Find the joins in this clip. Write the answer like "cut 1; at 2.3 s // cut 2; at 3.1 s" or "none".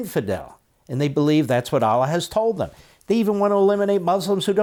none